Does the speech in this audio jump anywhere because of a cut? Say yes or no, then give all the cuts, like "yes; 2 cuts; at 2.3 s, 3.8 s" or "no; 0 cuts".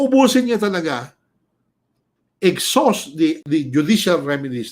yes; 1 cut; at 3.4 s